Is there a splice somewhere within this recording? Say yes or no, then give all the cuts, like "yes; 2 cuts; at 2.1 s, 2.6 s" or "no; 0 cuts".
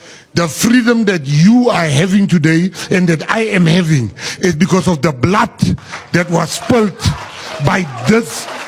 no; 0 cuts